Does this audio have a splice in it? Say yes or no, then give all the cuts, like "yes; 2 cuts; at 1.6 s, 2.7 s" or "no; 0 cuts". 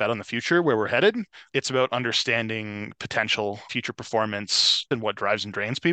yes; 2 cuts; at 3.7 s, 4.9 s